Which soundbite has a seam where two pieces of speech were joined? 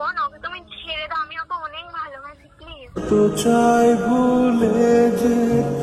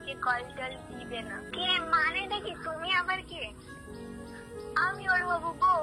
second; 1 cut; at 1.5 s

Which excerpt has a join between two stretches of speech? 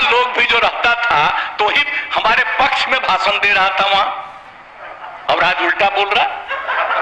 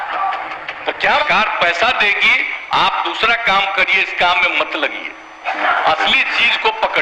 second; 1 cut; at 1.2 s

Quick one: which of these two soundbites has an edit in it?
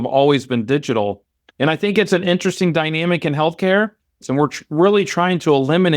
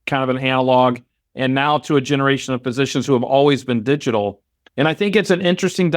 first; 1 cut; at 4.1 s

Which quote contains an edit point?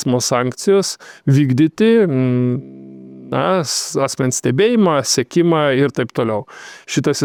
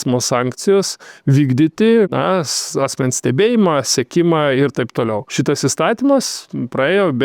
second; 2 cuts; at 2.1 s, 5.2 s

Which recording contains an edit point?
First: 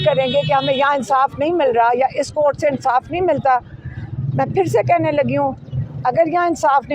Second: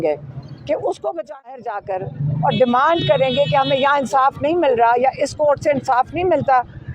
second; 1 cut; at 1.6 s

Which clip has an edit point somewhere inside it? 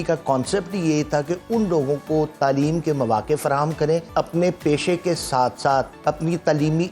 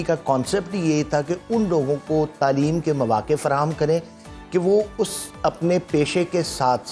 first; 2 cuts; at 4.1 s, 5.9 s

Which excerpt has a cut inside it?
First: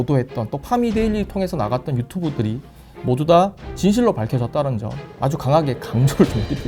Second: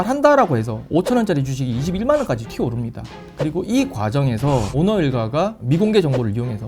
second; 2 cuts; at 2.5 s, 4.7 s

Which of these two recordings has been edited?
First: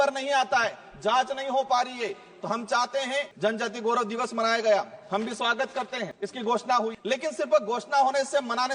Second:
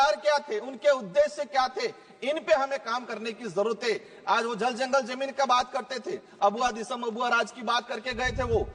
first; 1 cut; at 3.3 s

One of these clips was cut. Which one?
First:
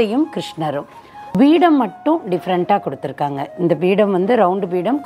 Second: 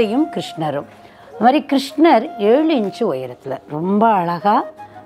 first; 1 cut; at 1.4 s

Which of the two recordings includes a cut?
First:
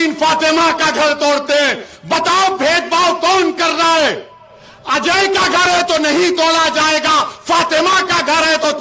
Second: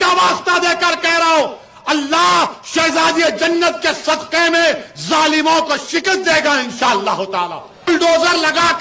second; 1 cut; at 7.9 s

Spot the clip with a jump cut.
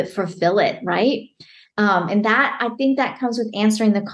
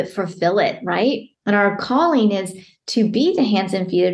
second; 1 cut; at 1.3 s

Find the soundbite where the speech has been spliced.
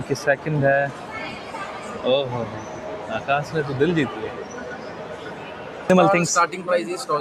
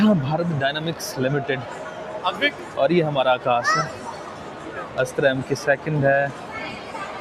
first; 1 cut; at 5.9 s

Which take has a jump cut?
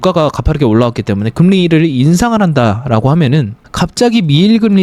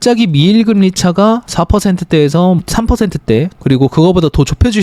second; 1 cut; at 2.6 s

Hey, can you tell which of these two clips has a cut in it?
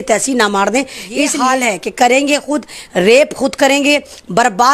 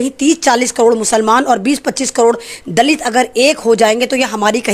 first; 1 cut; at 1.3 s

